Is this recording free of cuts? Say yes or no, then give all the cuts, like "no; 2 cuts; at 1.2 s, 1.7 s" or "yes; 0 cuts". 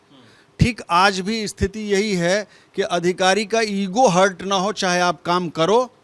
yes; 0 cuts